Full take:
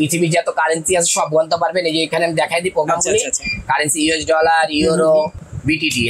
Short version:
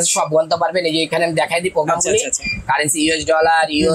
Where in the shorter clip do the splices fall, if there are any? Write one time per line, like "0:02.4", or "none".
none